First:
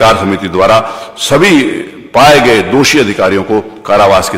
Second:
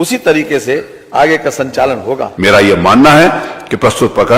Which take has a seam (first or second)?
second